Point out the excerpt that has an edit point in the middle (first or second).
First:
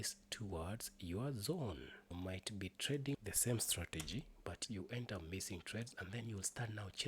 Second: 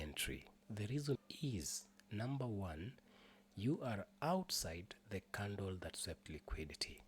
first